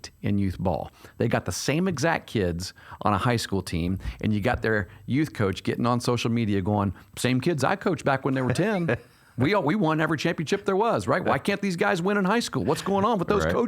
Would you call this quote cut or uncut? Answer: uncut